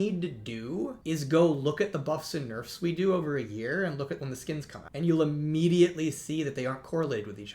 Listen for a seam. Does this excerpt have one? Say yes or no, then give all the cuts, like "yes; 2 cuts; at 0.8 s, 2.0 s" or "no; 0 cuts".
yes; 2 cuts; at 1.0 s, 4.8 s